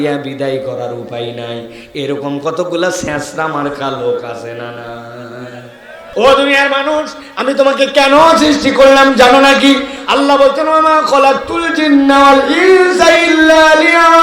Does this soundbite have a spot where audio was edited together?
yes; 1 cut; at 6.0 s

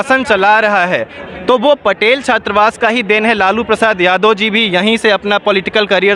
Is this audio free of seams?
yes; 0 cuts

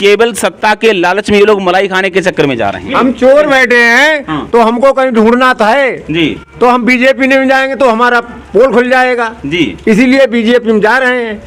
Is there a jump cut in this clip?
no; 0 cuts

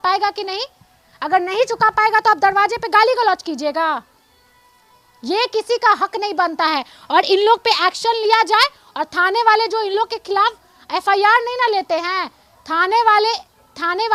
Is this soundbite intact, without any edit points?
yes; 0 cuts

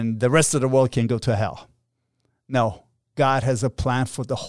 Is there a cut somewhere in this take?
no; 0 cuts

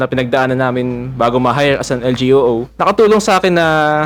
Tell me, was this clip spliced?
no; 0 cuts

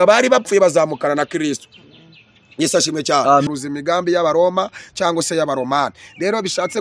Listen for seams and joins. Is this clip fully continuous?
no; 1 cut; at 3.5 s

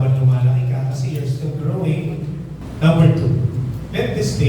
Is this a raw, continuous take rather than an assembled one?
no; 1 cut; at 2.6 s

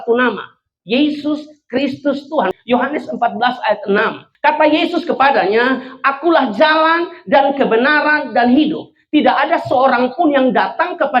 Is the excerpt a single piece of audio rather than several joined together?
no; 2 cuts; at 2.5 s, 4.2 s

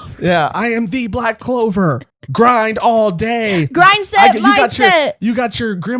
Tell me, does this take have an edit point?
yes; 1 cut; at 2.1 s

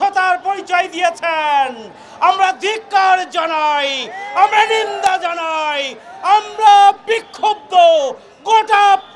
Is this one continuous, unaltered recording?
yes; 0 cuts

